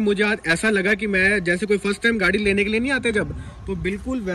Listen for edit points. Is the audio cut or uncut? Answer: uncut